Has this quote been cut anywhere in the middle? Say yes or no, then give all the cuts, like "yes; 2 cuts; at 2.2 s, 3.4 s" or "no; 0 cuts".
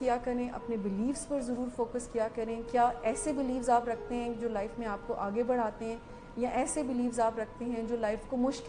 no; 0 cuts